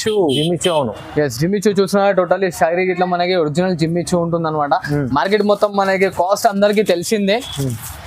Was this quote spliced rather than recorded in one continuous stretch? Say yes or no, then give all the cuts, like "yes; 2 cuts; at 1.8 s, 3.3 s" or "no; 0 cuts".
no; 0 cuts